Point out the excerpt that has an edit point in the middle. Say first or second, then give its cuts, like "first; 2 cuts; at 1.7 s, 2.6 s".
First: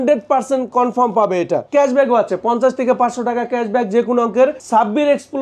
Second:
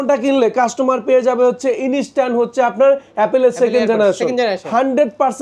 first; 2 cuts; at 1.7 s, 4.6 s